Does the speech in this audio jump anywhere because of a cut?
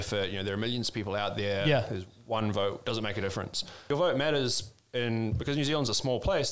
yes; 1 cut; at 3.7 s

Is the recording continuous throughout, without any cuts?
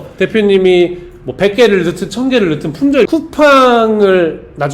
no; 1 cut; at 3.1 s

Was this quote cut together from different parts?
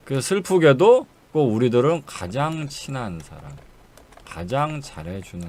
no; 0 cuts

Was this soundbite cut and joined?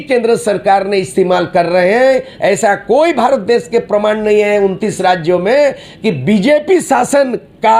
no; 0 cuts

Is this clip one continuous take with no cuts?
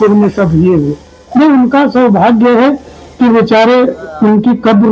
yes; 0 cuts

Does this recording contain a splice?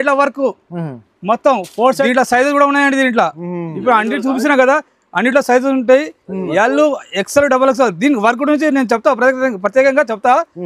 yes; 1 cut; at 2.0 s

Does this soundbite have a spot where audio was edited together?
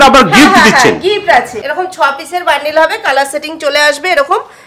yes; 1 cut; at 1.6 s

